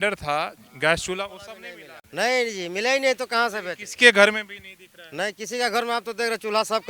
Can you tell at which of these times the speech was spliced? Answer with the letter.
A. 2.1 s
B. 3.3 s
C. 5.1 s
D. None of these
A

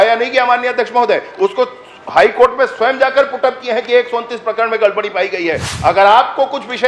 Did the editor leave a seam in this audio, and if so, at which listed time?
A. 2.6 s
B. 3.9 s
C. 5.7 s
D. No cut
C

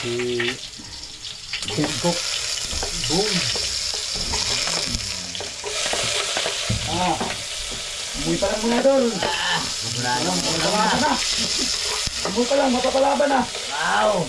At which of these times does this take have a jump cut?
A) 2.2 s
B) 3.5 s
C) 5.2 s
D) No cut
D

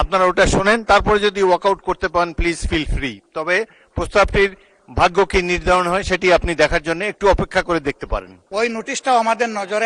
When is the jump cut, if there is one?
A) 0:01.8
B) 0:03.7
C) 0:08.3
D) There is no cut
D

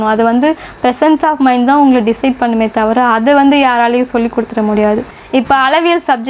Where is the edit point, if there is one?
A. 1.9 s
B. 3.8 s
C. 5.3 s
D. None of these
C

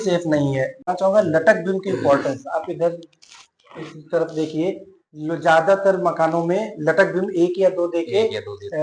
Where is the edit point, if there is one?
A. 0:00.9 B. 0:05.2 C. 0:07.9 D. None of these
A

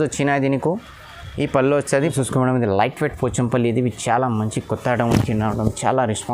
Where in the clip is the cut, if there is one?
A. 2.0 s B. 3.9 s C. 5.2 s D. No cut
A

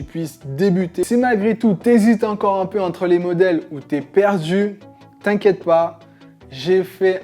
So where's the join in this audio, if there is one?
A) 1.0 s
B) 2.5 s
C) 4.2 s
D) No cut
A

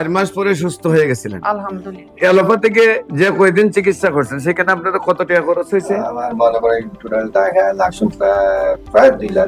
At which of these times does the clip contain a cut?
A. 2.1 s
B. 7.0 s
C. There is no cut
A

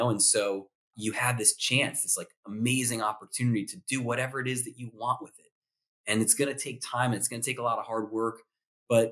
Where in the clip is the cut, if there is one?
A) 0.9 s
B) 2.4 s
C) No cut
A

